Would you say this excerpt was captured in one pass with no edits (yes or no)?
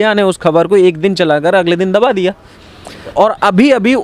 no